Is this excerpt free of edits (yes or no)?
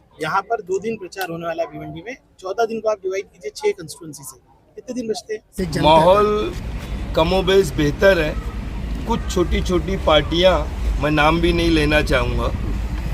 no